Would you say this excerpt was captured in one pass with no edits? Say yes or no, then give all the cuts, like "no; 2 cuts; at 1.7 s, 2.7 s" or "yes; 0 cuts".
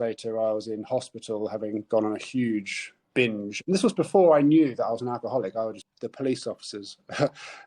no; 1 cut; at 5.8 s